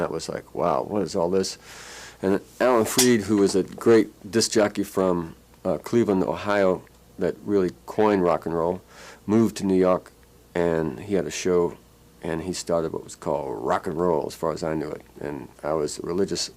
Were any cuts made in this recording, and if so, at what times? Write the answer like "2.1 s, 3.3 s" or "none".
4.4 s